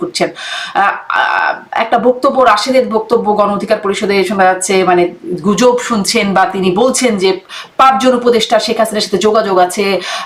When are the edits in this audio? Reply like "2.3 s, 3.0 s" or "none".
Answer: none